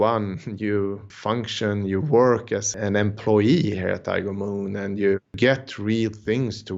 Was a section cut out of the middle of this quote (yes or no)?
yes